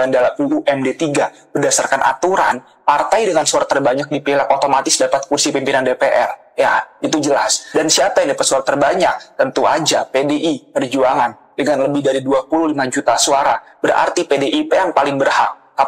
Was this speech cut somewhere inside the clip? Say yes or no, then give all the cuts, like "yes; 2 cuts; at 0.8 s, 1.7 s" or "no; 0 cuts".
no; 0 cuts